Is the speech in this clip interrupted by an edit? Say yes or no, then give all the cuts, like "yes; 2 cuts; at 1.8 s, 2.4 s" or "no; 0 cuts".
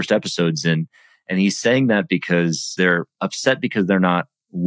yes; 1 cut; at 2.7 s